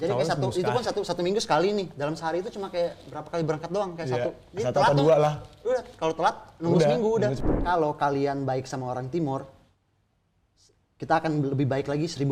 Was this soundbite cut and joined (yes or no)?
yes